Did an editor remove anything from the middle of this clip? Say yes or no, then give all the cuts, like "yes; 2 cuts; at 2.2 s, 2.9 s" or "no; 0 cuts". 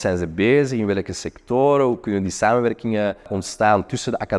yes; 1 cut; at 3.4 s